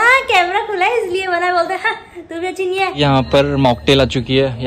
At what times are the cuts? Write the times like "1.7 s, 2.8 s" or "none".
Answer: 3.0 s

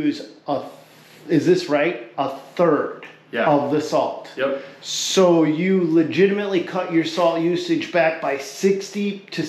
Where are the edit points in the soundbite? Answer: none

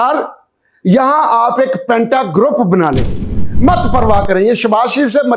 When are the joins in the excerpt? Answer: 3.4 s

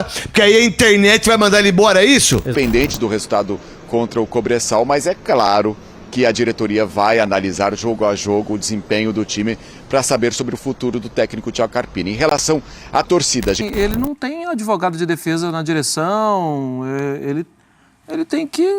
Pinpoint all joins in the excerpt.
2.5 s, 13.6 s

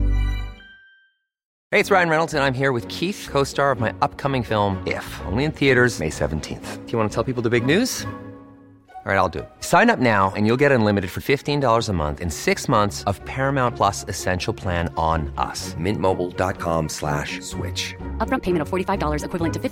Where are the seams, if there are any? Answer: 1.6 s

